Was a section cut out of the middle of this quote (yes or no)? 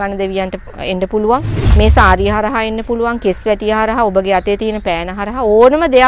yes